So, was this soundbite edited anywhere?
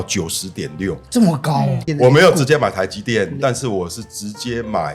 yes; 1 cut; at 1.8 s

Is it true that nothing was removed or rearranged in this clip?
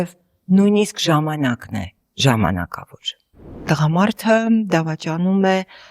no; 1 cut; at 3.6 s

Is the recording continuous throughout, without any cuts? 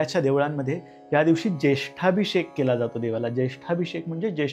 yes; 0 cuts

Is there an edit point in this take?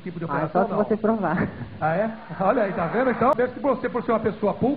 yes; 1 cut; at 3.2 s

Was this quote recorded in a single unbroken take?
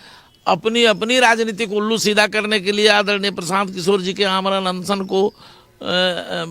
yes; 0 cuts

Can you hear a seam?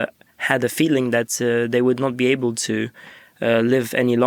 no; 0 cuts

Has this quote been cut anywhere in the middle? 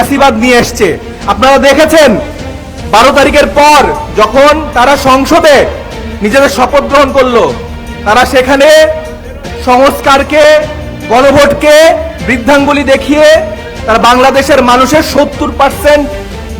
no; 0 cuts

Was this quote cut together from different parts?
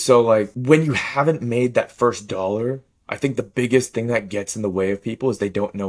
no; 0 cuts

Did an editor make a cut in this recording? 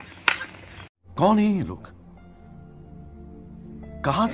no; 0 cuts

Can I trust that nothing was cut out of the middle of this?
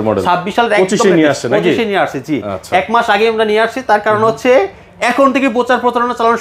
yes; 0 cuts

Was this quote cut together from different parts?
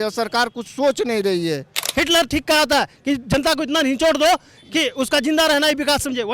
yes; 1 cut; at 1.8 s

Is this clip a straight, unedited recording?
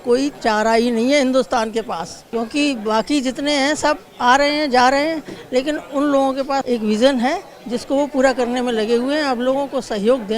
no; 2 cuts; at 2.1 s, 6.6 s

